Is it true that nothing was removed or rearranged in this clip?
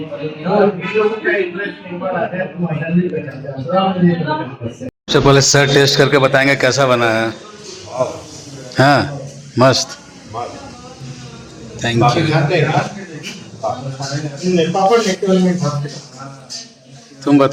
yes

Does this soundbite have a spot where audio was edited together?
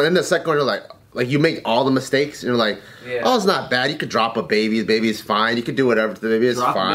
no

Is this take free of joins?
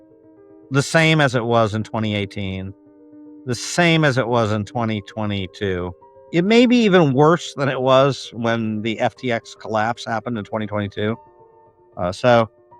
no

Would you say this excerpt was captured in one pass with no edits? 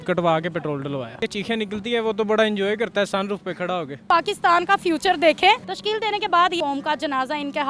no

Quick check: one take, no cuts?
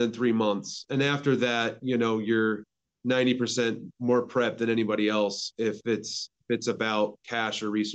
yes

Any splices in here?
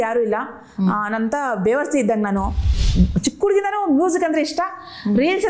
yes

